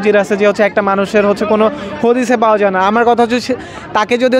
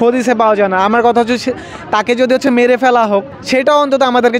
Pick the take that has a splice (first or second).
second